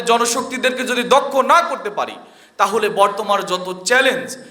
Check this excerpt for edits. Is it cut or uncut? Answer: uncut